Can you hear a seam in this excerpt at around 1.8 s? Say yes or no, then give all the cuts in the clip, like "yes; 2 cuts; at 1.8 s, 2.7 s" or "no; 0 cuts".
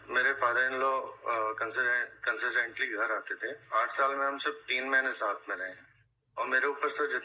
no; 0 cuts